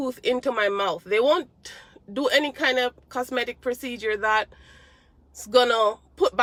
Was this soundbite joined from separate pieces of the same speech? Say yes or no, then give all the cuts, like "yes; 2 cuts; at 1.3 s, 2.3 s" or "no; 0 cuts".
no; 0 cuts